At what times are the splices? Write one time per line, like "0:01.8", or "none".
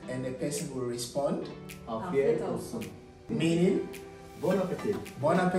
0:03.3